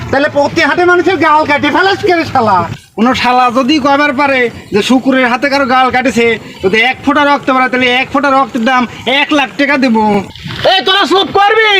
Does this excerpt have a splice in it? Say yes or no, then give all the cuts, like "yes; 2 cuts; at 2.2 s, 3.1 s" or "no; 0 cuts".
yes; 1 cut; at 2.8 s